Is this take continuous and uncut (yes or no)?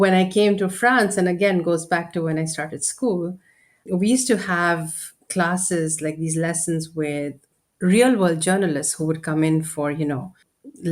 no